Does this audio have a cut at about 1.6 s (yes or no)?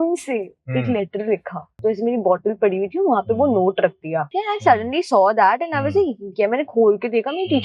yes